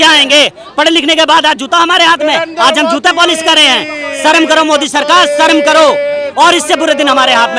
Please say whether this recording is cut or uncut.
uncut